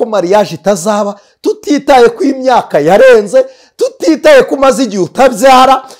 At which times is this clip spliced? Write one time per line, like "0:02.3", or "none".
none